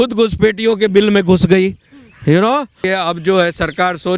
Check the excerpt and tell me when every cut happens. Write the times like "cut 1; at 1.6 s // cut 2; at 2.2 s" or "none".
cut 1; at 2.9 s